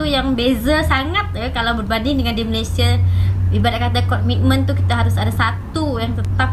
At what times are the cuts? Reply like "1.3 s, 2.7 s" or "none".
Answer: none